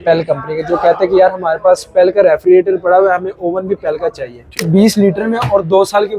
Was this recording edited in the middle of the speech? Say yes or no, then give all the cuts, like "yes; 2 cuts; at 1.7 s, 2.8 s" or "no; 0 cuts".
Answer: yes; 1 cut; at 4.7 s